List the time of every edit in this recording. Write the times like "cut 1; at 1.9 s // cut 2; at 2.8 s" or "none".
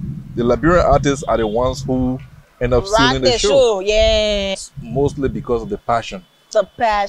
cut 1; at 4.5 s

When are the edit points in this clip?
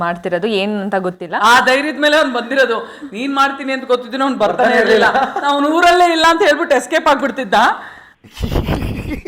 cut 1; at 8.1 s

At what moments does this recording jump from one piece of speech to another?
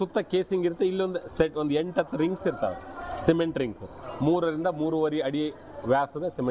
none

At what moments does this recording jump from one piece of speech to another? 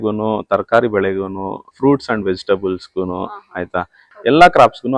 cut 1; at 1.7 s // cut 2; at 4.0 s

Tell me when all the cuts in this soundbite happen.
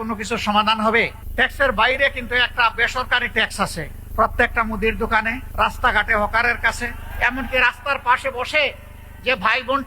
cut 1; at 1.2 s // cut 2; at 4.0 s // cut 3; at 5.4 s // cut 4; at 7.1 s

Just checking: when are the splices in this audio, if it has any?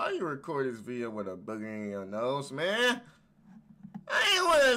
none

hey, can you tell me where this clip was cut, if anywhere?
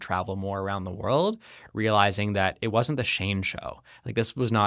none

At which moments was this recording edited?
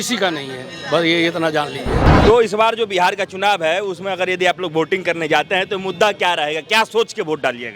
cut 1; at 2.0 s

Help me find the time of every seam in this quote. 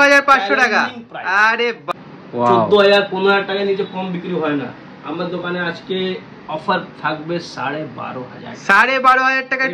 cut 1; at 1.8 s

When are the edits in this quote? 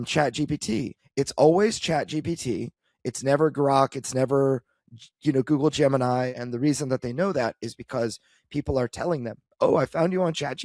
cut 1; at 1.0 s // cut 2; at 6.3 s

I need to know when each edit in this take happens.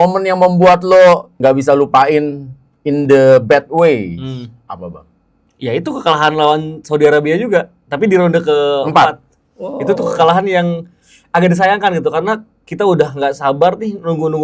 cut 1; at 1.3 s

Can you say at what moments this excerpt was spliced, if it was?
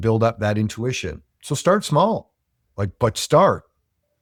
none

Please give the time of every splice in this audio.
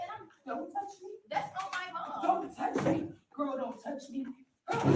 cut 1; at 2.3 s

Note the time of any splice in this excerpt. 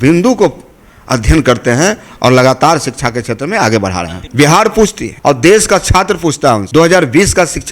cut 1; at 4.2 s // cut 2; at 5.1 s // cut 3; at 6.6 s

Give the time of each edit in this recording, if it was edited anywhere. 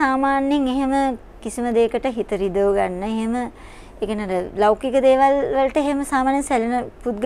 none

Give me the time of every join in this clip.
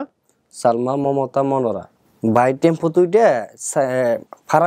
cut 1; at 1.9 s

